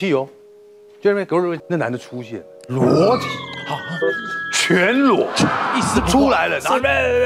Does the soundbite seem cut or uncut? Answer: cut